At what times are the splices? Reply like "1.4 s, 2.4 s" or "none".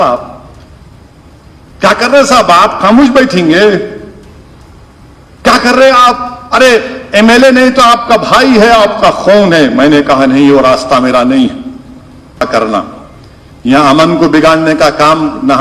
12.5 s